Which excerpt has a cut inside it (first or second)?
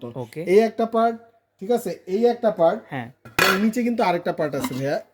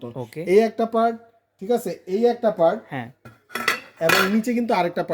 first